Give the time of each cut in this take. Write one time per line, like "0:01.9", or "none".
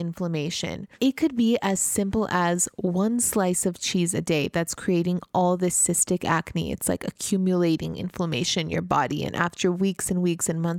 0:01.0